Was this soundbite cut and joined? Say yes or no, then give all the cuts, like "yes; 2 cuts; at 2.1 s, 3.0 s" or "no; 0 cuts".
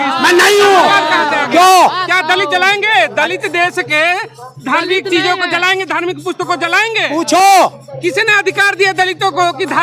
no; 0 cuts